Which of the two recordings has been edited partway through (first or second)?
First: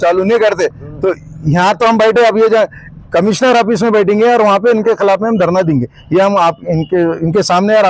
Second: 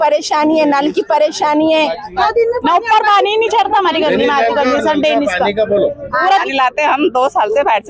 second